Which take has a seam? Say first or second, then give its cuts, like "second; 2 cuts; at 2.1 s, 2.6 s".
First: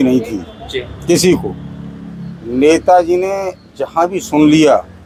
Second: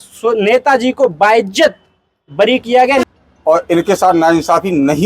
second; 1 cut; at 3.0 s